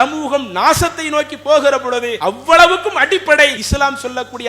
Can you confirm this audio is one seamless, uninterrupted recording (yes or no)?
no